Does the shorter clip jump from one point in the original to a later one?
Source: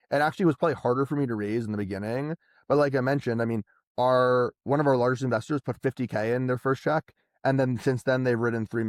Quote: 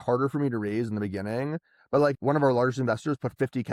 yes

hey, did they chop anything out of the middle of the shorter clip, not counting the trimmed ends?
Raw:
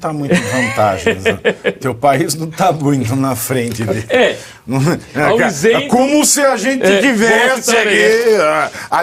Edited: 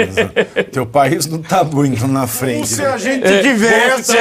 yes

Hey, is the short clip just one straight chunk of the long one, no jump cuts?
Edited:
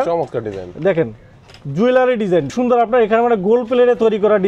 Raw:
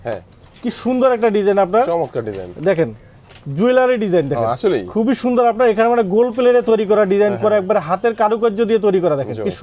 no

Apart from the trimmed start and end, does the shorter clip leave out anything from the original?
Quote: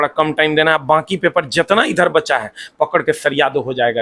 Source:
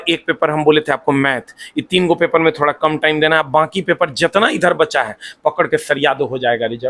no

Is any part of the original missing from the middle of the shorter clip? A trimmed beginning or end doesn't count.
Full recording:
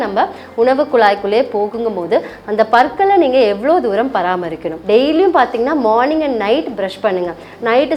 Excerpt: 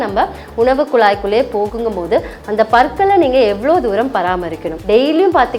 no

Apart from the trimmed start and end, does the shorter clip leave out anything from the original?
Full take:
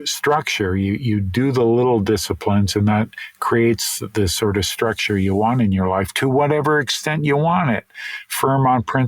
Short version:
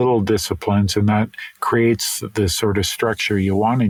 no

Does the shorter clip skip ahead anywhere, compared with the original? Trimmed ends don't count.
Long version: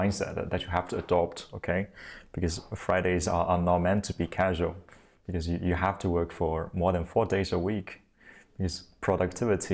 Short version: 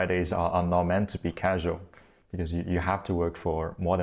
no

